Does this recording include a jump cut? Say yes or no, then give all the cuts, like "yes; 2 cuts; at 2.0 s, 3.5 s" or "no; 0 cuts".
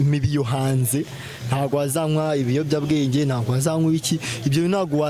no; 0 cuts